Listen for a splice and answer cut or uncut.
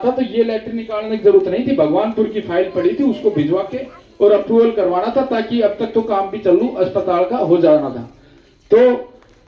uncut